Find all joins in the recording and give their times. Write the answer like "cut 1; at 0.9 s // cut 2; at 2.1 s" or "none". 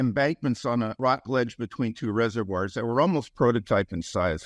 cut 1; at 1.0 s